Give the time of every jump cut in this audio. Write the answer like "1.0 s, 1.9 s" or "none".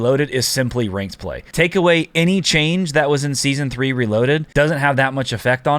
1.4 s, 4.5 s